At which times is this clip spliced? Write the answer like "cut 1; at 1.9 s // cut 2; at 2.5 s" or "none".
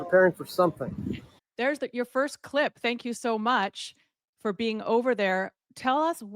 none